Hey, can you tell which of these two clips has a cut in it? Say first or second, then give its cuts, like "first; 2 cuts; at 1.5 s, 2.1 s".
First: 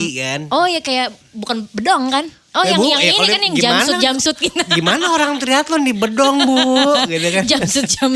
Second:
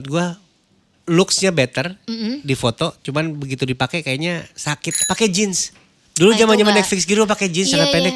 second; 1 cut; at 4.9 s